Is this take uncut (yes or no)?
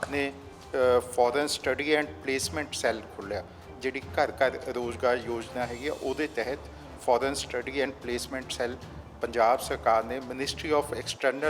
yes